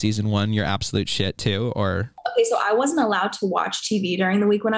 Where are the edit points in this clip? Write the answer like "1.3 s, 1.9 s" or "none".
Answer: 2.1 s